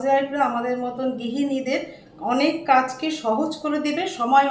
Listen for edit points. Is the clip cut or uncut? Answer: uncut